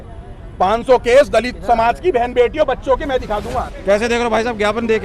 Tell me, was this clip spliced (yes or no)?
yes